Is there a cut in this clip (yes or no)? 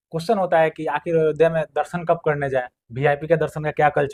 no